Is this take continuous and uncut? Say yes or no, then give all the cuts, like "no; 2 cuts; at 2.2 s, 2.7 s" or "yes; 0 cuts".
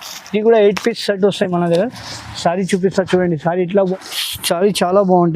no; 1 cut; at 3.9 s